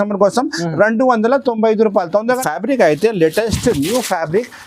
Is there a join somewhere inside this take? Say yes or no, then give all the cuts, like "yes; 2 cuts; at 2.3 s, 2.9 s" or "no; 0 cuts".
yes; 1 cut; at 2.3 s